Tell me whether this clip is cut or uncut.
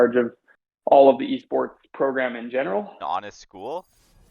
cut